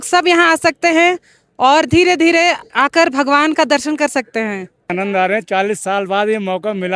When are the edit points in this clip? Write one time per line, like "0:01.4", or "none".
0:04.9